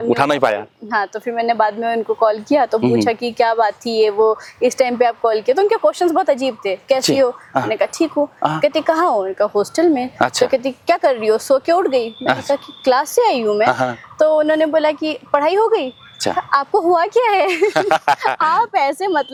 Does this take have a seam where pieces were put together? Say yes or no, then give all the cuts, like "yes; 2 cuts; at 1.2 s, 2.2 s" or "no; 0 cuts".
no; 0 cuts